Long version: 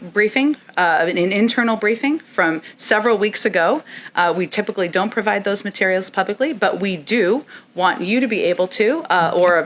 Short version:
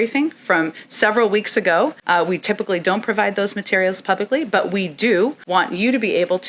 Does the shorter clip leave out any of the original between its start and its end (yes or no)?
yes